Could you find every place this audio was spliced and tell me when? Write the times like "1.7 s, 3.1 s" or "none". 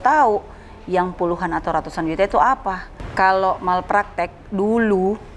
2.9 s